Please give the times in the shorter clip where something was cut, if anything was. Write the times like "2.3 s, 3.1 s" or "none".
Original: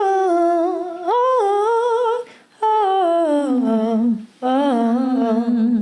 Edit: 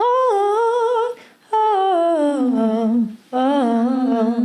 none

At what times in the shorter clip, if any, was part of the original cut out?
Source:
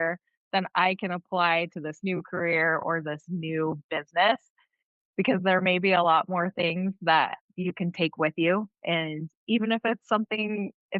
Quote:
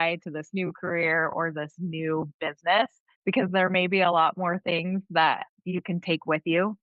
3.1 s

